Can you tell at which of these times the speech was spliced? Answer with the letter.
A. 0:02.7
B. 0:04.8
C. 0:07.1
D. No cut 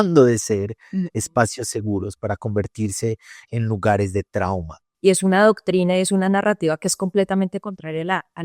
B